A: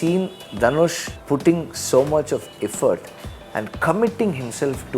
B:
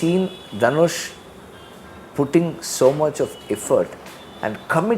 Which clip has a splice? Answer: A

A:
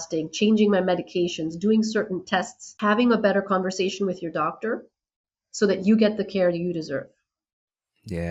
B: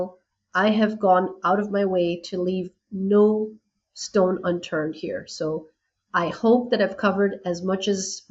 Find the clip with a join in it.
A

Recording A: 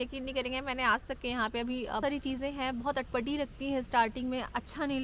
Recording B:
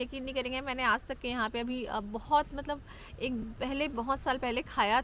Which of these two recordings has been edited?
A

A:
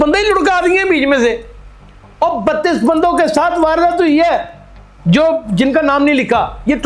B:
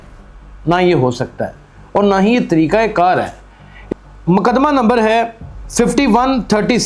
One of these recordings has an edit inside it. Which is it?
B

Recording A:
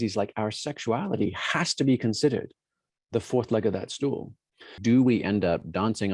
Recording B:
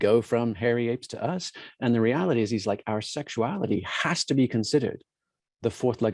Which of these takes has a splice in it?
A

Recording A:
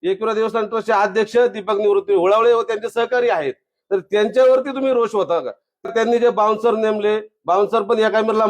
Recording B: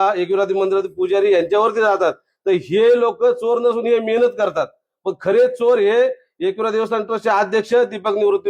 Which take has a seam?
A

